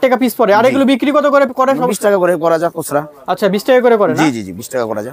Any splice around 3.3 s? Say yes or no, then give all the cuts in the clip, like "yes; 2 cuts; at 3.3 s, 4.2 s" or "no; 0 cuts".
no; 0 cuts